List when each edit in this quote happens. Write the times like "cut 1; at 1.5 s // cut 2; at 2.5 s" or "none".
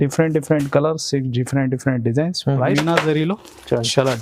cut 1; at 2.6 s